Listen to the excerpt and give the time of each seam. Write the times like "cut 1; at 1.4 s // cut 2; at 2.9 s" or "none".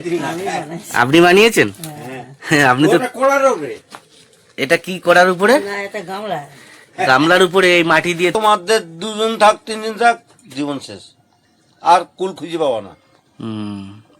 cut 1; at 8.3 s